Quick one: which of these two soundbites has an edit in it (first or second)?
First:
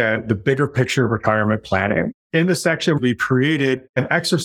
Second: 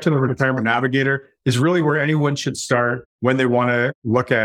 first